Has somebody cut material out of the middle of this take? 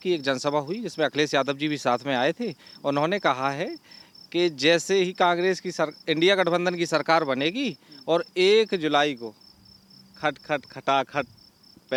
no; 0 cuts

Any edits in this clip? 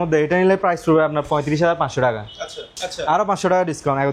yes; 1 cut; at 2.7 s

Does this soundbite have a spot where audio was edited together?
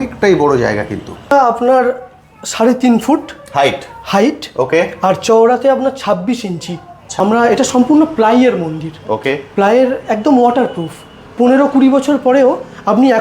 yes; 2 cuts; at 1.3 s, 7.0 s

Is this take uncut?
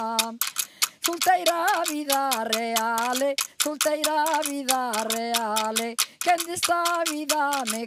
yes; 0 cuts

